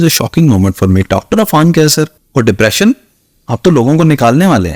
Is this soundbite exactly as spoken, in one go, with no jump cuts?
no; 1 cut; at 2.2 s

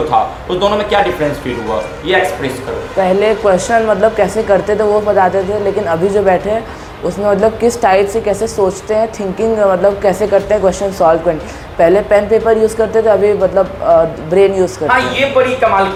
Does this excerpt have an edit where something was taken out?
no; 0 cuts

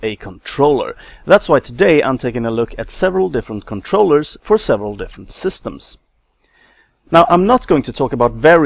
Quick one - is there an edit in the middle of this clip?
no; 0 cuts

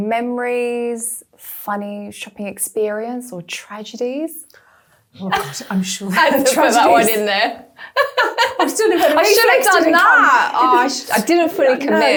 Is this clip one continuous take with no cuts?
yes; 0 cuts

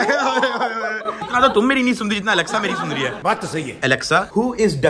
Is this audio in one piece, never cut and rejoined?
no; 2 cuts; at 1.2 s, 3.3 s

